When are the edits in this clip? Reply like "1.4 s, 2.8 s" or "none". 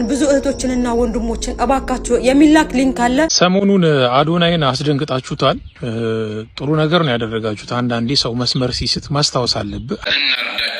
3.3 s, 10.0 s